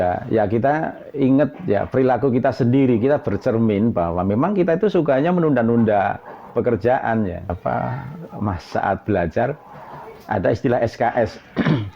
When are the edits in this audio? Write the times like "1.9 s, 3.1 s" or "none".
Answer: 7.5 s